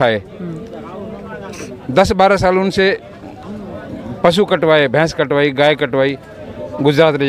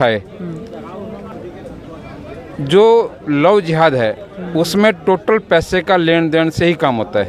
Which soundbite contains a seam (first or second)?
second